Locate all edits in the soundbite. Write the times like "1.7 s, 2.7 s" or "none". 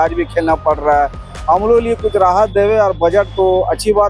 none